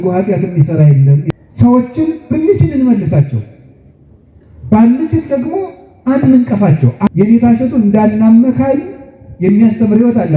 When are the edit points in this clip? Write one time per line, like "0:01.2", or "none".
0:01.2
0:07.1